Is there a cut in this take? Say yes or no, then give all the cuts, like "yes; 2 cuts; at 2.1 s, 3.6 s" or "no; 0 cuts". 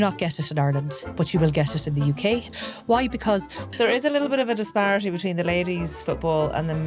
yes; 3 cuts; at 1.0 s, 2.5 s, 3.7 s